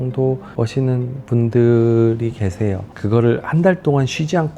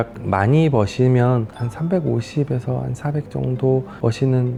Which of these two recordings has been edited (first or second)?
first